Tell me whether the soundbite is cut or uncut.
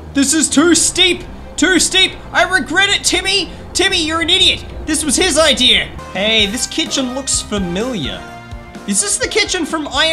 cut